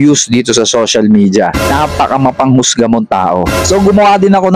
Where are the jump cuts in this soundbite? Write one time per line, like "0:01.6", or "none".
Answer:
0:01.8
0:03.5

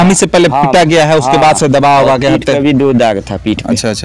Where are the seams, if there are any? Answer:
none

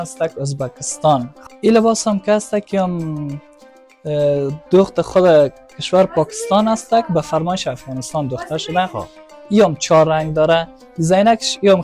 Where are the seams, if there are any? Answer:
0:01.4

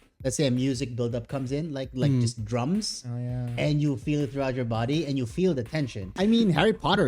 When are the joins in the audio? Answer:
0:06.2

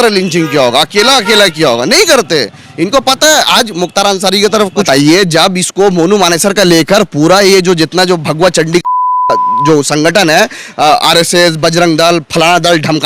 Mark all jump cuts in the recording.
0:04.4

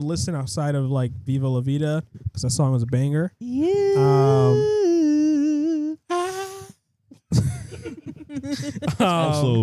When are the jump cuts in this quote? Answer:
none

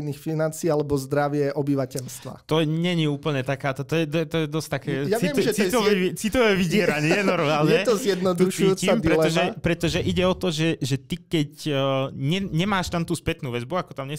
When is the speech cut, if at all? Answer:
none

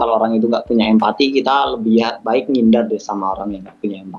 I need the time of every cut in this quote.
none

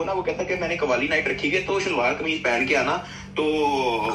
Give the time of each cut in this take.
none

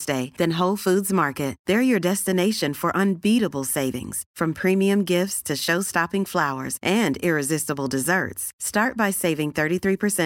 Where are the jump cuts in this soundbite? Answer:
none

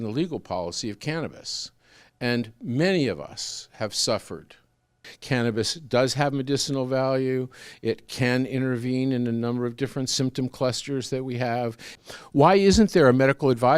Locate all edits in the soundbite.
0:05.1
0:11.9

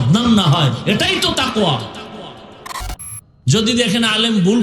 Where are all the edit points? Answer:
0:03.0

